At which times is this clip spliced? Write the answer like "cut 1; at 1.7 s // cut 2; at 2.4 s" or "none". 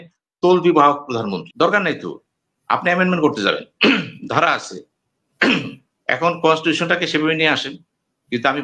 cut 1; at 1.5 s